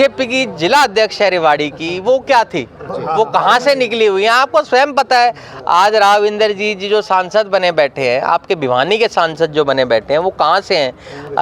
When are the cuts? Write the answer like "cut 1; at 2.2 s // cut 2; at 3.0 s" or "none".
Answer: none